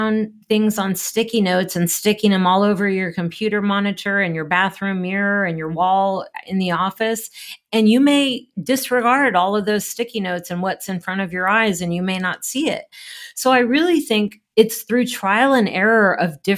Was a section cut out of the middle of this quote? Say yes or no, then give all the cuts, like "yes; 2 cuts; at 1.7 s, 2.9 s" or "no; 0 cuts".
no; 0 cuts